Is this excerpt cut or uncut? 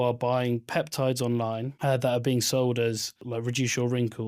cut